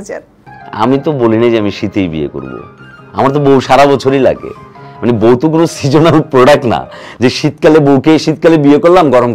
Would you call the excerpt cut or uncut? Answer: uncut